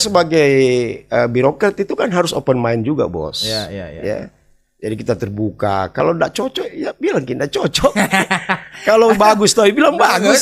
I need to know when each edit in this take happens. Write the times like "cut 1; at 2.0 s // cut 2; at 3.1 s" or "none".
none